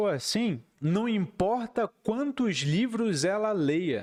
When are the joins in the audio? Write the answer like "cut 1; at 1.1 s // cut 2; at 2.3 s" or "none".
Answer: none